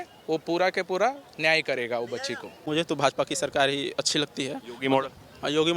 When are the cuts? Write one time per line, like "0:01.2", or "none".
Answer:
0:02.6